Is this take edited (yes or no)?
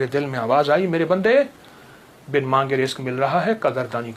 no